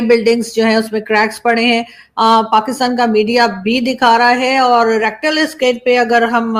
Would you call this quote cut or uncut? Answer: uncut